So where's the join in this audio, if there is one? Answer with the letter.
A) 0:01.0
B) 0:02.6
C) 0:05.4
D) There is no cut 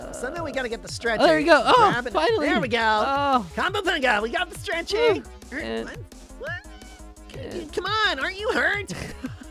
C